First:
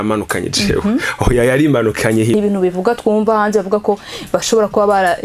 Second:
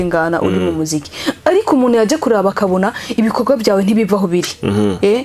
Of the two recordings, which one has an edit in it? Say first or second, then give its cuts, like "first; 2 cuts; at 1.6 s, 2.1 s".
first; 1 cut; at 2.3 s